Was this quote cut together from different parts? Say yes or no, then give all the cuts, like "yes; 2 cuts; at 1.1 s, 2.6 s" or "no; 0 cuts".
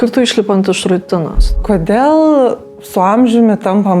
yes; 1 cut; at 1.6 s